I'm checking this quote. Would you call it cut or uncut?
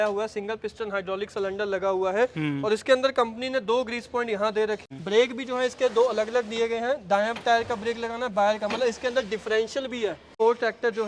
cut